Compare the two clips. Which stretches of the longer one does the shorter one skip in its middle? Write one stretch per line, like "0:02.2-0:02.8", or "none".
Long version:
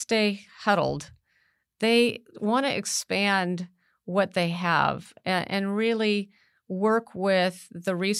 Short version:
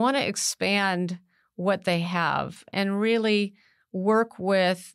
0:05.2-0:05.5